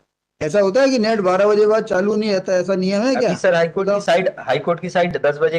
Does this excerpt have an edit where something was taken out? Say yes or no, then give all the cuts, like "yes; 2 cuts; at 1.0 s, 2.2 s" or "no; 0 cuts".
no; 0 cuts